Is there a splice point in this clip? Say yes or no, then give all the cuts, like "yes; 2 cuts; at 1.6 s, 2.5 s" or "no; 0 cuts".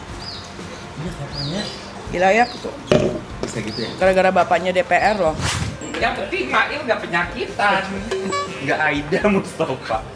yes; 2 cuts; at 1.9 s, 5.8 s